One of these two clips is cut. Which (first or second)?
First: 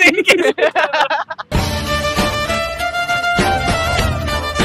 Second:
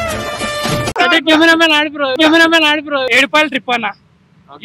second